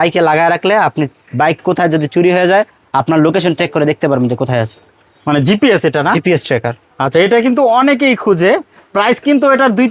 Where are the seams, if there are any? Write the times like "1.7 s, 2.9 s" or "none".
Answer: none